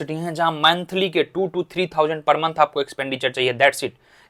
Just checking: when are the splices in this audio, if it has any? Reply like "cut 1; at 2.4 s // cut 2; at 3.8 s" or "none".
none

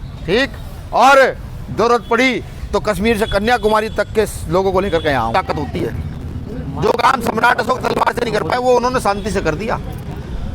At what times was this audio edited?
cut 1; at 5.3 s

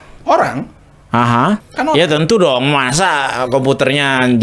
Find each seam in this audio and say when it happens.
cut 1; at 1.7 s

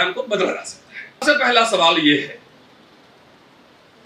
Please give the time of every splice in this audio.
cut 1; at 1.2 s

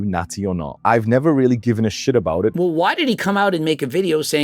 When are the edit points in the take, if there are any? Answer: cut 1; at 2.5 s

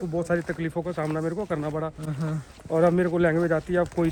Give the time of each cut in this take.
none

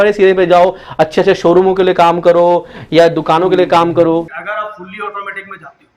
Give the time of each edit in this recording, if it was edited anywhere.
cut 1; at 4.3 s

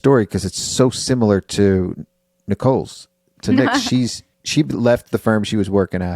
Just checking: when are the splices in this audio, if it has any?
cut 1; at 4.4 s

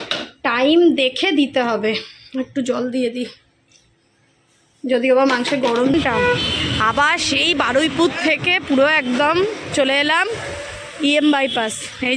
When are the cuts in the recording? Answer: cut 1; at 5.9 s

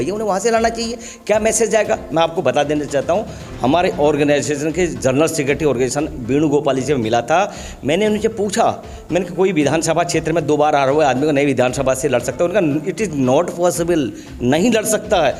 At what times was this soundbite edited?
none

